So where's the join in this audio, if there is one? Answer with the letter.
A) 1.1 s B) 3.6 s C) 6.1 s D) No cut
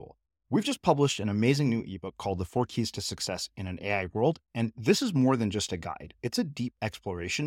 D